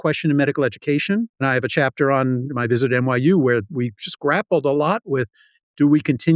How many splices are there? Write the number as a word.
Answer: one